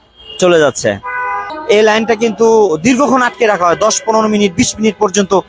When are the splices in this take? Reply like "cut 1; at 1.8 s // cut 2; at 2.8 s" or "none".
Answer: cut 1; at 1.5 s